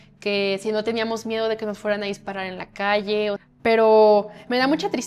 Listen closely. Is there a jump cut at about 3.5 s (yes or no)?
yes